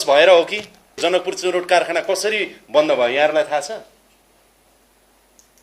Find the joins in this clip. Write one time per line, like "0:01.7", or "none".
0:01.0